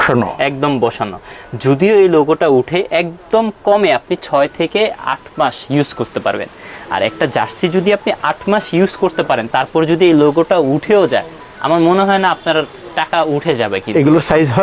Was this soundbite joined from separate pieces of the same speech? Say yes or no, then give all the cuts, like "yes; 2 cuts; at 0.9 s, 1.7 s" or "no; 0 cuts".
no; 0 cuts